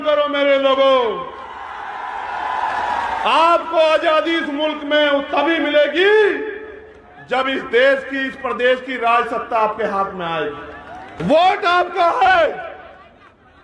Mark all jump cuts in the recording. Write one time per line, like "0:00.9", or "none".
0:11.1